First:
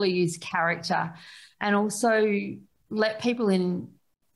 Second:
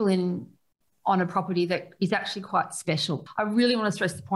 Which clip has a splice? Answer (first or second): second